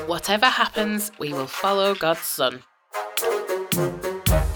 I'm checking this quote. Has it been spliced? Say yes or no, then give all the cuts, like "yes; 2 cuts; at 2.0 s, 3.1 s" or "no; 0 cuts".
yes; 1 cut; at 3.0 s